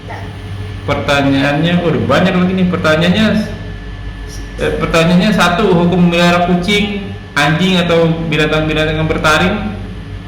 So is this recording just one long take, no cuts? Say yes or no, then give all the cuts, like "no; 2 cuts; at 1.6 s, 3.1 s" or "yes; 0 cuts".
yes; 0 cuts